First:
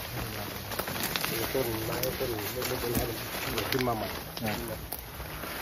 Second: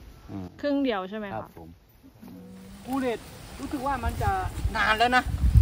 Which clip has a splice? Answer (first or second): second